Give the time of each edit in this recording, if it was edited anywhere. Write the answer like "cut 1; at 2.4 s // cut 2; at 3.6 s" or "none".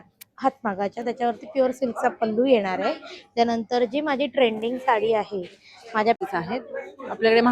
cut 1; at 6.2 s